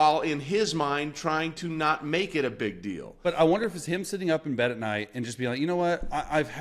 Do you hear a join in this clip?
yes; 1 cut; at 3.1 s

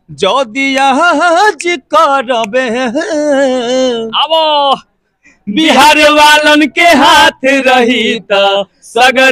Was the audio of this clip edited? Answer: no; 0 cuts

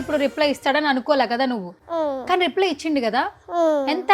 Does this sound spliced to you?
yes; 1 cut; at 1.7 s

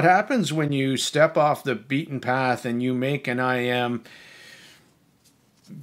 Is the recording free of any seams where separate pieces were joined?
yes; 0 cuts

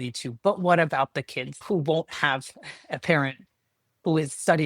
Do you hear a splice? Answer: yes; 1 cut; at 1.6 s

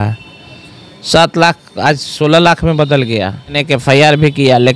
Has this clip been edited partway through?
yes; 1 cut; at 3.6 s

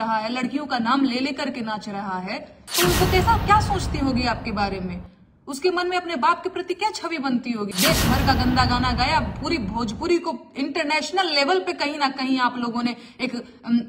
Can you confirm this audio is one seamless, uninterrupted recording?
no; 2 cuts; at 2.6 s, 7.7 s

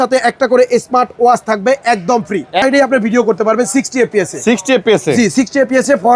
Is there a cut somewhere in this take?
yes; 1 cut; at 2.6 s

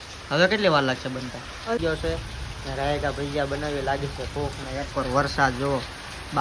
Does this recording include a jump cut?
yes; 1 cut; at 1.8 s

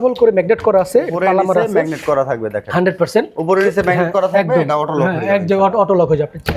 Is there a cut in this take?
no; 0 cuts

